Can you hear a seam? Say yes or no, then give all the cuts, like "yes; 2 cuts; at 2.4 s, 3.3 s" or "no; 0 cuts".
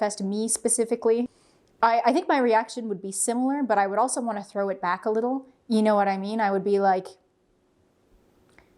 yes; 1 cut; at 1.4 s